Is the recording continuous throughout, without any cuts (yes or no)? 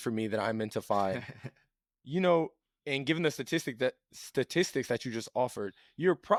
yes